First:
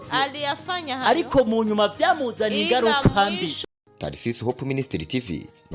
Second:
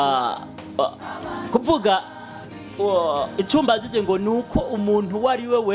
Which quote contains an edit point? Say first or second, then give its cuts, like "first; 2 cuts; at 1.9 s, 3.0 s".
first; 1 cut; at 3.6 s